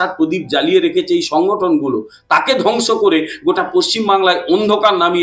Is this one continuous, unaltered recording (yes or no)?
yes